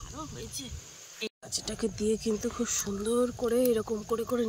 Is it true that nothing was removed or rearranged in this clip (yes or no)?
no